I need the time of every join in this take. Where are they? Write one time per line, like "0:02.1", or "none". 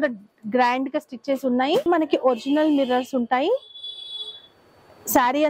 0:02.1